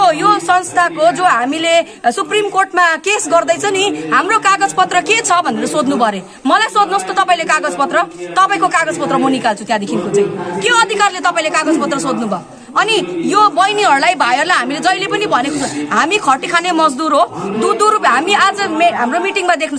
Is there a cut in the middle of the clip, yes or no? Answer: no